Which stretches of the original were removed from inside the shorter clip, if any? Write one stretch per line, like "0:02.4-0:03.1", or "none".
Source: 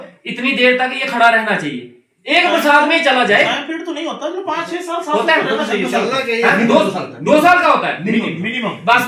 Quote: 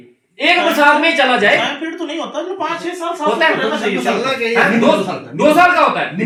none